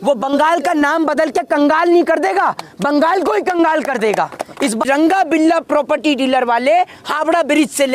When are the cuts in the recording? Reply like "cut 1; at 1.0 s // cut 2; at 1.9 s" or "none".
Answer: cut 1; at 4.8 s